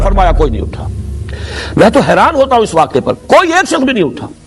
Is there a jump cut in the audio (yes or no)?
no